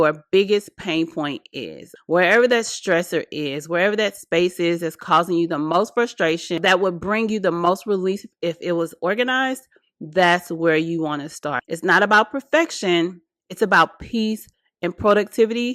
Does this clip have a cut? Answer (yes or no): yes